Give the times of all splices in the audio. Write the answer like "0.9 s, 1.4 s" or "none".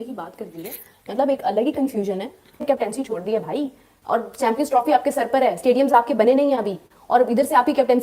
2.5 s